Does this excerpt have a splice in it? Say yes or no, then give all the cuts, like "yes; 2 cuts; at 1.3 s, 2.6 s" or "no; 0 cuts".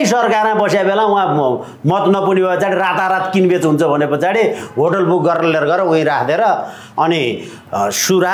no; 0 cuts